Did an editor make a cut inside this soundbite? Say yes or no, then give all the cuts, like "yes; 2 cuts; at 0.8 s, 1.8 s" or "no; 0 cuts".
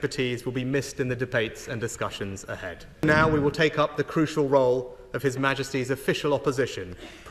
yes; 1 cut; at 3.0 s